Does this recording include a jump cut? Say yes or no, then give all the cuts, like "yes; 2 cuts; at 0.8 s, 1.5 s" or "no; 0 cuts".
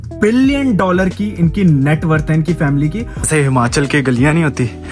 yes; 1 cut; at 3.2 s